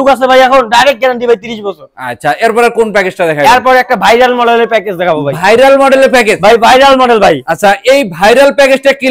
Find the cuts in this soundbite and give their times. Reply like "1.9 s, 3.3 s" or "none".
none

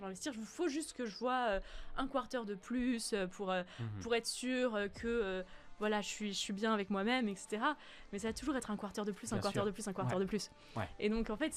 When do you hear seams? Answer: none

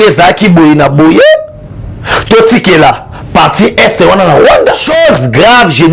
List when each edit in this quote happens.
4.8 s

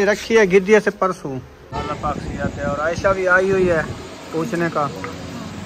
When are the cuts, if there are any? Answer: 1.8 s

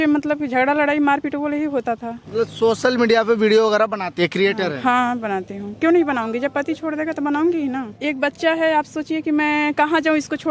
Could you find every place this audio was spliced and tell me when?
2.1 s, 8.0 s

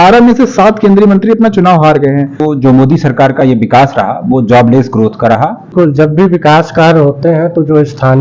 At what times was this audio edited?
2.4 s, 5.7 s

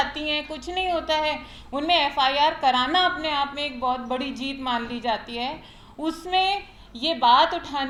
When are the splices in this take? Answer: none

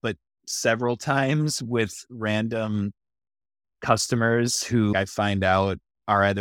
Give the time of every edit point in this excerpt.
4.9 s

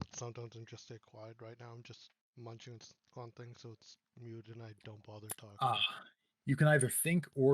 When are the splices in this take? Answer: 2.2 s

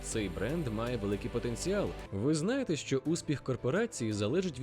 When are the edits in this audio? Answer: 2.0 s

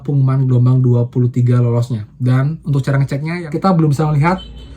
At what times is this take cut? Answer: 3.3 s

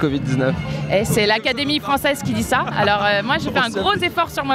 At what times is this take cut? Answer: none

